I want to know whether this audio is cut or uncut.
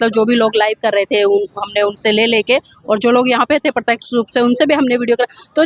uncut